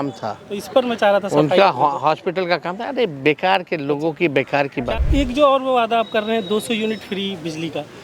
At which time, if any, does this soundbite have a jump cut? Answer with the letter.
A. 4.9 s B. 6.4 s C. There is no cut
A